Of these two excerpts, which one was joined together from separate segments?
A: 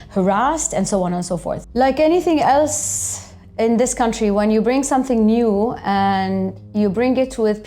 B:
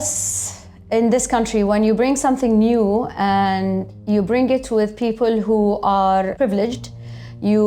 A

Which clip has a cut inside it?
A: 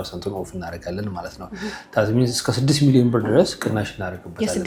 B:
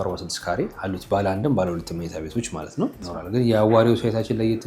B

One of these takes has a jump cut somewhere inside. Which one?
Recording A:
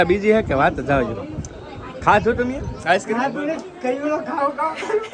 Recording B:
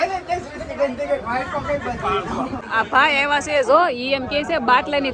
B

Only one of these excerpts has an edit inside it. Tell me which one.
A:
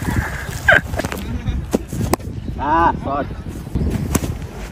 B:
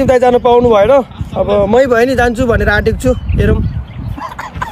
A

